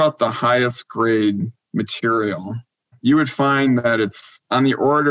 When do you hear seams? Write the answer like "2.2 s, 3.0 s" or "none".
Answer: 2.9 s

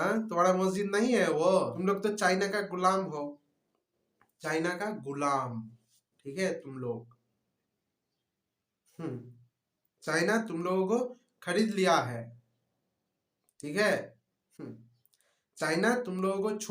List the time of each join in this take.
1.8 s

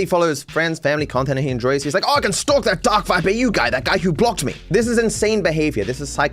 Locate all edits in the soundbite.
1.8 s

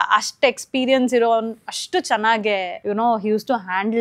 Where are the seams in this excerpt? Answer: 2.7 s

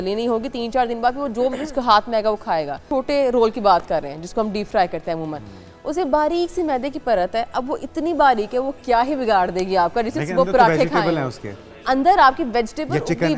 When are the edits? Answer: 2.8 s

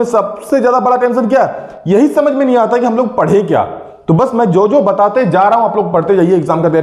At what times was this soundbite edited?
none

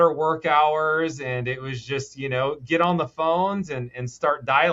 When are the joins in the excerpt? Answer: none

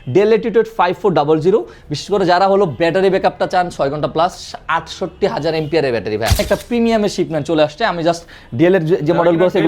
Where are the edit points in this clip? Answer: 6.4 s

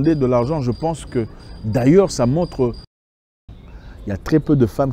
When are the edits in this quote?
3.2 s

